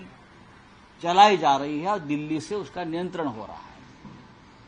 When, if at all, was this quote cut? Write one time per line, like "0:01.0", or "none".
none